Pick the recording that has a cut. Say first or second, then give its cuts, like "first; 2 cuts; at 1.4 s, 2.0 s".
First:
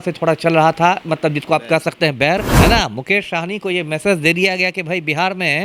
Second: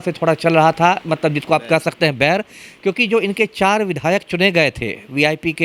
first; 1 cut; at 2.5 s